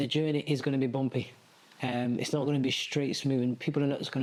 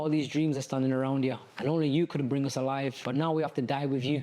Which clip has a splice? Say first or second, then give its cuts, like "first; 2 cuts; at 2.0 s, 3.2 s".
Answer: second; 2 cuts; at 1.5 s, 3.0 s